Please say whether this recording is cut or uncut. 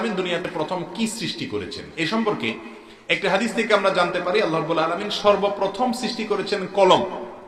uncut